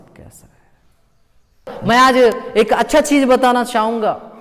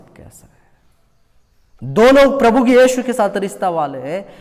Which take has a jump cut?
first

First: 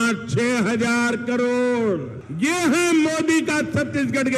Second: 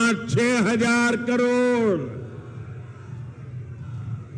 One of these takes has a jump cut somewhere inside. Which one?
first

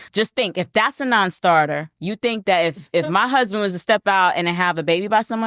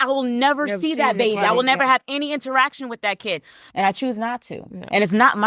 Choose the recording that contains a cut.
second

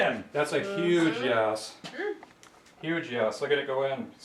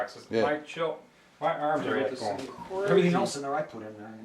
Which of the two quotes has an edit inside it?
second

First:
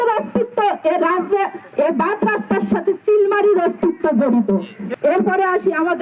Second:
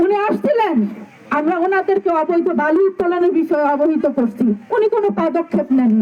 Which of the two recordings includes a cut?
first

